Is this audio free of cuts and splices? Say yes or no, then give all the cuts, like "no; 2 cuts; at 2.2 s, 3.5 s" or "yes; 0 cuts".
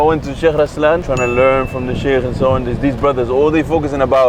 no; 1 cut; at 1.1 s